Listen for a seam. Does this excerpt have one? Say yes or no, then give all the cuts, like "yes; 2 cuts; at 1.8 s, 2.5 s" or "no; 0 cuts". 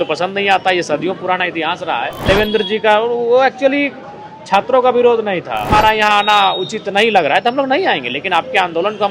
yes; 2 cuts; at 2.3 s, 5.7 s